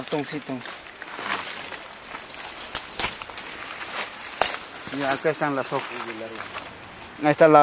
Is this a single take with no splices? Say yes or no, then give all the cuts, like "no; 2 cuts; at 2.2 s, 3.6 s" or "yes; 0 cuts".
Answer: yes; 0 cuts